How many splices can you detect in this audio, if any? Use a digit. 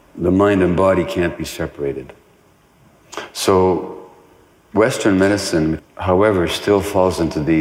1